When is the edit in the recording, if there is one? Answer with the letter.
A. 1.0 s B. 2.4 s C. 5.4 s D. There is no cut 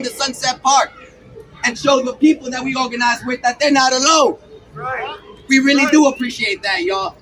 D